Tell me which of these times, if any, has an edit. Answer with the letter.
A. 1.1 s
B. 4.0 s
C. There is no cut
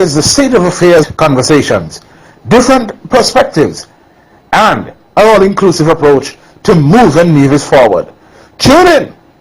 A